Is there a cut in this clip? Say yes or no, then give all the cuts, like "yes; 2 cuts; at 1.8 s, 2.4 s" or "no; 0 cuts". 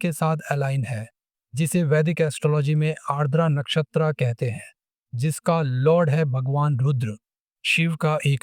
no; 0 cuts